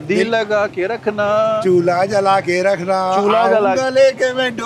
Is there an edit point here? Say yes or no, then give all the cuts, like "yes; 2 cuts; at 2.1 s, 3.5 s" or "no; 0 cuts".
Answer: no; 0 cuts